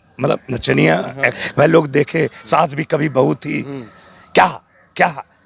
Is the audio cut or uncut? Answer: cut